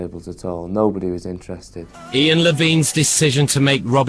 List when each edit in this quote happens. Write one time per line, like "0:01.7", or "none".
0:02.0